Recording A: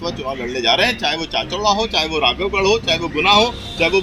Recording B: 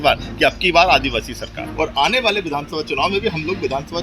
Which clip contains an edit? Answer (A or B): B